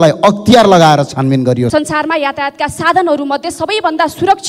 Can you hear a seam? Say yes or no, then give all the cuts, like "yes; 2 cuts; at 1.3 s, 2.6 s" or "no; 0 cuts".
yes; 1 cut; at 1.7 s